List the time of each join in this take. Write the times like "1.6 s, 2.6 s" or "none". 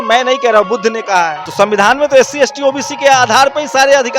1.4 s